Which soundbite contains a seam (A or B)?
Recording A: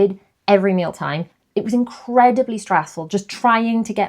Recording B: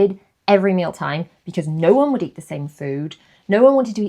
A